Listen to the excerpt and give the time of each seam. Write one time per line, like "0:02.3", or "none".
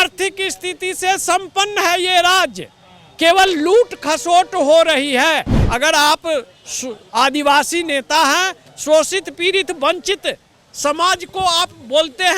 0:05.6